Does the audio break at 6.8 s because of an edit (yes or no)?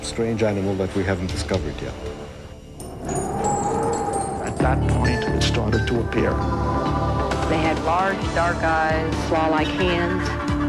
no